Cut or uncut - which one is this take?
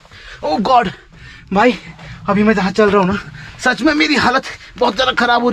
uncut